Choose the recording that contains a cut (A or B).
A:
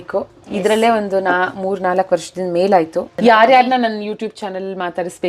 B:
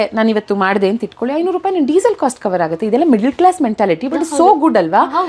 A